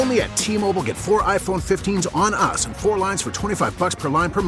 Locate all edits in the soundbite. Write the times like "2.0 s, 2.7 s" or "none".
none